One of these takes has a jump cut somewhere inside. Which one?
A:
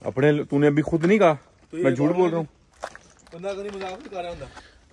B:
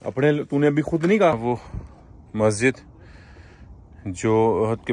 B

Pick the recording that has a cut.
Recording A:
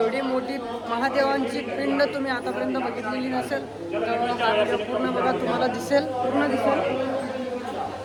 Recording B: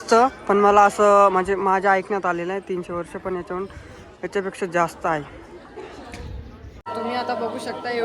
B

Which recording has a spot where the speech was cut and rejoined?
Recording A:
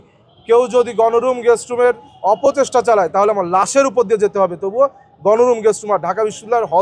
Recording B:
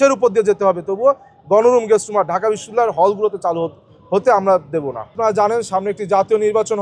B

